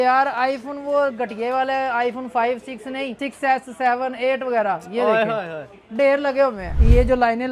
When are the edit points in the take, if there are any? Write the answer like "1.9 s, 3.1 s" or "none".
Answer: 3.2 s, 6.7 s